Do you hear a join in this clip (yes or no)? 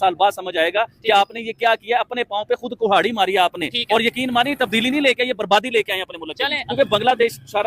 yes